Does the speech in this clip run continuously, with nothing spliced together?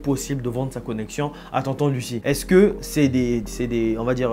no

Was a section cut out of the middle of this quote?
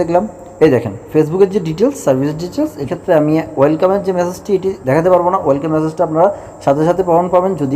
yes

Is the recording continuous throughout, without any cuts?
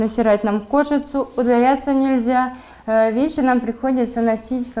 yes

